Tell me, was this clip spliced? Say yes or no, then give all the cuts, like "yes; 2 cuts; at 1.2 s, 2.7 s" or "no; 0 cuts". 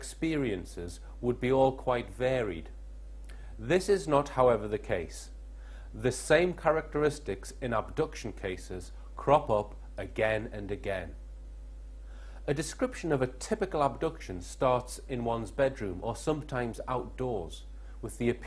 yes; 1 cut; at 4.8 s